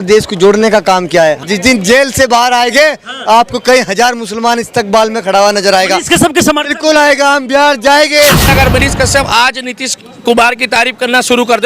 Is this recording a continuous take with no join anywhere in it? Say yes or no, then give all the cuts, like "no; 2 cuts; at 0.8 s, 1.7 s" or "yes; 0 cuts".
no; 2 cuts; at 1.4 s, 8.5 s